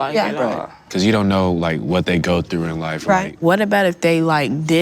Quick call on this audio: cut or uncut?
cut